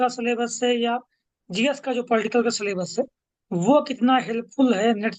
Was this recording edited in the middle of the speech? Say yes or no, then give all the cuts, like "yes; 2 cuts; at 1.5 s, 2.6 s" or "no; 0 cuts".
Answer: no; 0 cuts